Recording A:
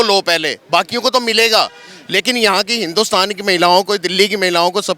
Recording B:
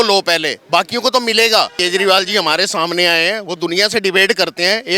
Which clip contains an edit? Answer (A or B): B